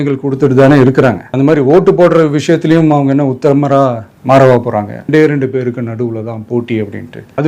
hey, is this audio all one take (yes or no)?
no